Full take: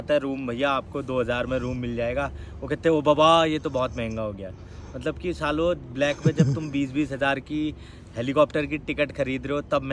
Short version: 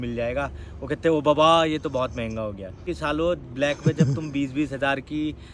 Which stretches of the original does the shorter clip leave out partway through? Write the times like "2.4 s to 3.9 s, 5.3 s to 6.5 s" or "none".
4.6 s to 5.2 s